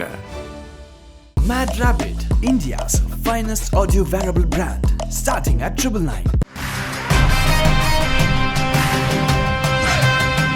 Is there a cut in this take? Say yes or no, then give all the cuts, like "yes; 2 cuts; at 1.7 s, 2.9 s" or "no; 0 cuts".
no; 0 cuts